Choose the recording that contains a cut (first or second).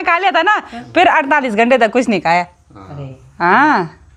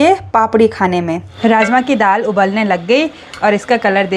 second